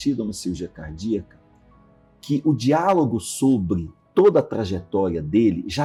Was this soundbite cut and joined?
no; 0 cuts

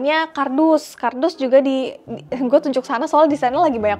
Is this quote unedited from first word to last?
yes; 0 cuts

